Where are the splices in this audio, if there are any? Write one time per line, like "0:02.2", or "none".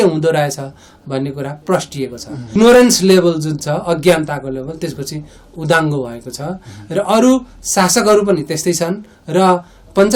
0:02.5

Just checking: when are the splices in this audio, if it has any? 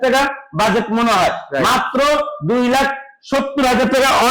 none

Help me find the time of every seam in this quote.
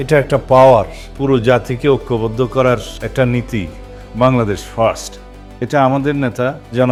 none

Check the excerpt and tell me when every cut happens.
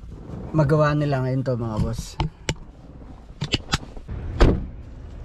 0:04.1

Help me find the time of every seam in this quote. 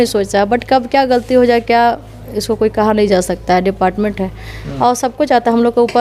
none

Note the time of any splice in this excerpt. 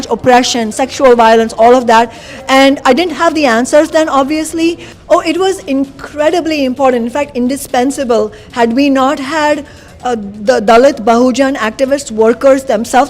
0:04.9

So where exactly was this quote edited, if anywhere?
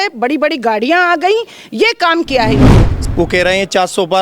0:02.9

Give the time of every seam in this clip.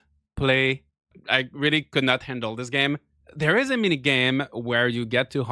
0:01.2
0:03.1

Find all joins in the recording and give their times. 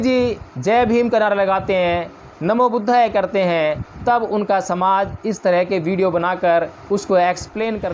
none

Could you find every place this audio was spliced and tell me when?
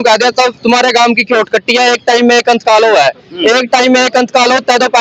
none

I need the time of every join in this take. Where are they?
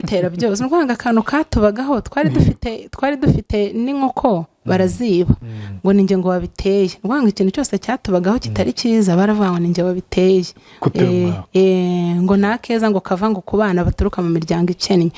none

